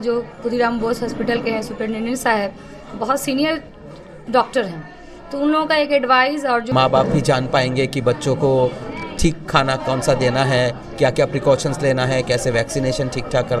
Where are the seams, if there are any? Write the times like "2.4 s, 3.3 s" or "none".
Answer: 6.7 s